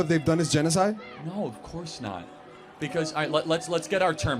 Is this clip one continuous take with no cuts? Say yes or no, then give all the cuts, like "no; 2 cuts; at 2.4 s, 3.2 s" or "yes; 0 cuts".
yes; 0 cuts